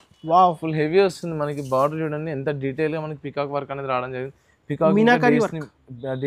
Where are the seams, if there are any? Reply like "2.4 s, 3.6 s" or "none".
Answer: none